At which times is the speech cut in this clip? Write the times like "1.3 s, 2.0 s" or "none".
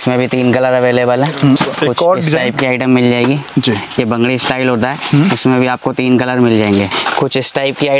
1.6 s, 6.9 s